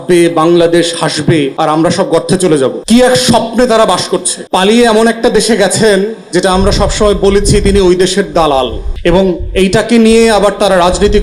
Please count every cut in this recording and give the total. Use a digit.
4